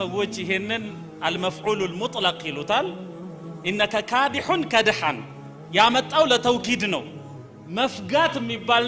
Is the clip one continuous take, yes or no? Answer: yes